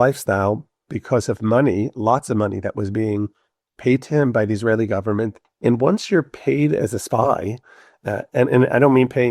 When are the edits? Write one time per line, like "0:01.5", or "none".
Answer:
0:05.4

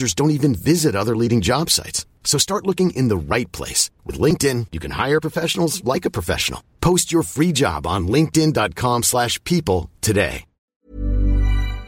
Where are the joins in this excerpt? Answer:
0:10.6

